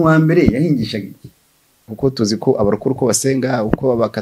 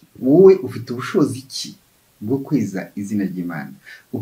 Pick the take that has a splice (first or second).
first